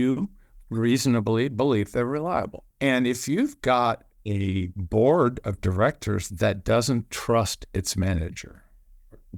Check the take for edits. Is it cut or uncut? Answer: cut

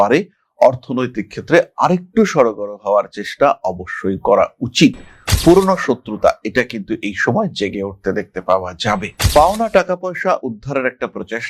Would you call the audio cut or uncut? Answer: uncut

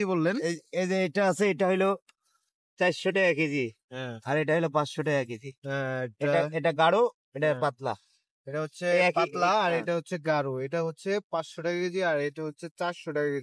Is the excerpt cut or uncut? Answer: uncut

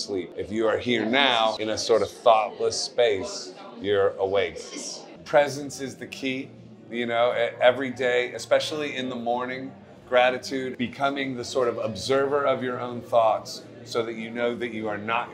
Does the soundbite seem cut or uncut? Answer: cut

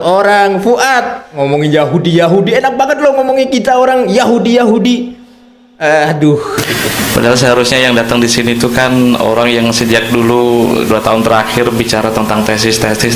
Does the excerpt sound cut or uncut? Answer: cut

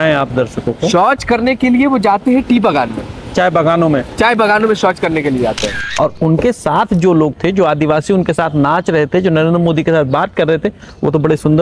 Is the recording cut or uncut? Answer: cut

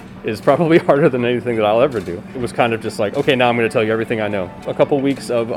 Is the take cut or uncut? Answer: cut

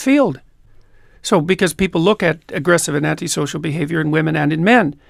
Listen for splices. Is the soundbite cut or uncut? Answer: uncut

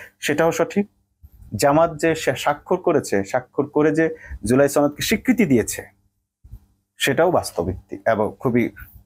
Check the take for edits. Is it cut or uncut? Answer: uncut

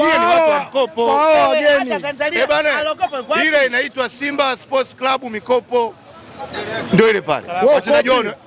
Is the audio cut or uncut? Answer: uncut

